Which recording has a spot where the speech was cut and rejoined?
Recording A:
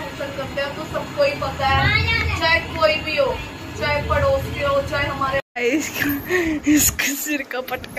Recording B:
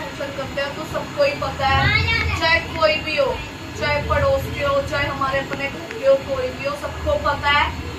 A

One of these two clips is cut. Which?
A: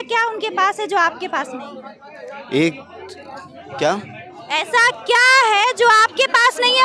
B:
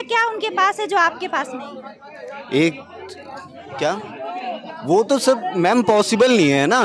B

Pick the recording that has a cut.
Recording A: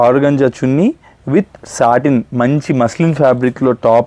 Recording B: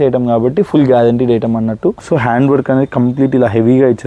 B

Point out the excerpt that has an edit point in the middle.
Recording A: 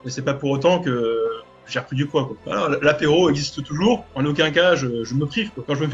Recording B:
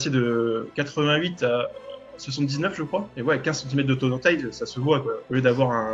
A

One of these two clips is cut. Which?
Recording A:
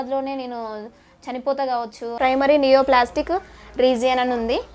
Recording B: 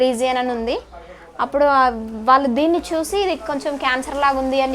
A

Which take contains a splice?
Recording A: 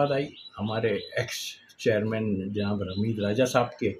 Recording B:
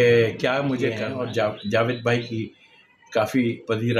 B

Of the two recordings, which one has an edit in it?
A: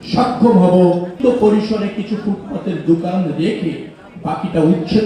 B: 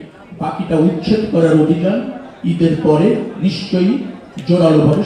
A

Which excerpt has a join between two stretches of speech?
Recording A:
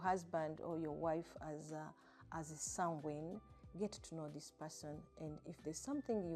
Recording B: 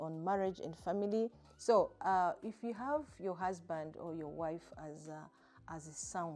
B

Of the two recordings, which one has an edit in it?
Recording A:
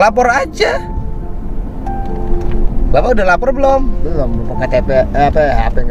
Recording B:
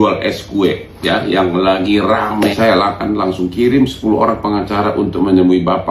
B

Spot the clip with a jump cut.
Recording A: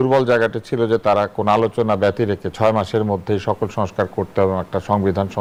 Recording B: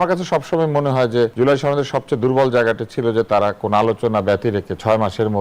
B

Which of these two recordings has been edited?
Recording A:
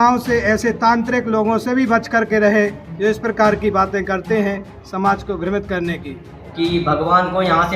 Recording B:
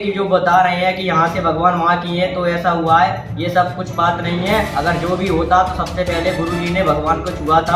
A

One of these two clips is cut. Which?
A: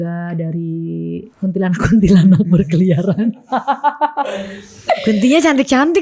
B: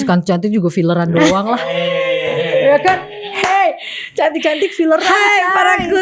A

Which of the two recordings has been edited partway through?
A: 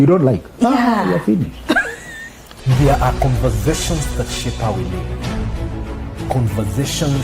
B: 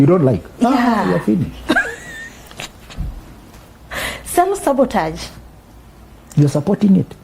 A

